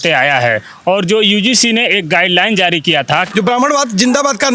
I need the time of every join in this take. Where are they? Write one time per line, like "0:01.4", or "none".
0:03.3